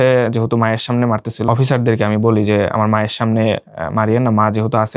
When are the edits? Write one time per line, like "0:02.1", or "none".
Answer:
0:01.5